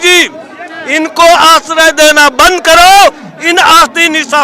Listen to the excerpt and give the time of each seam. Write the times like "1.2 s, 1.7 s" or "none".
none